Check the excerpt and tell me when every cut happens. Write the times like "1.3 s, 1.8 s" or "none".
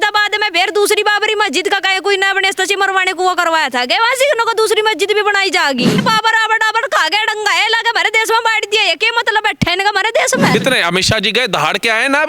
6.0 s, 10.5 s